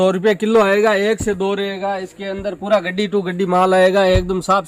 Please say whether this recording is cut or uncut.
uncut